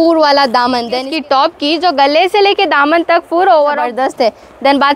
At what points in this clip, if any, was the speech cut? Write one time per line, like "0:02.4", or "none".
0:01.1
0:03.9